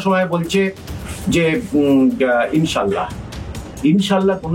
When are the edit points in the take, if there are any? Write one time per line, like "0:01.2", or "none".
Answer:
none